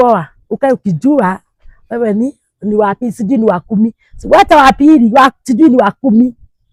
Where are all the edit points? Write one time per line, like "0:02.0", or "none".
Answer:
none